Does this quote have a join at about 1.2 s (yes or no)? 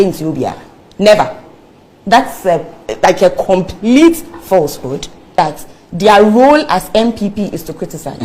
no